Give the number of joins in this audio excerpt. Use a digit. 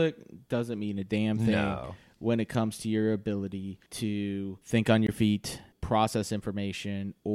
3